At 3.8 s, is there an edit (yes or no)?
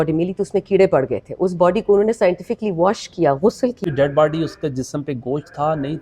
yes